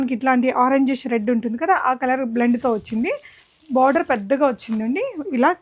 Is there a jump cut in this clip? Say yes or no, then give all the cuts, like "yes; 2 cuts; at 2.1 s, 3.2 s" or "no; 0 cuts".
no; 0 cuts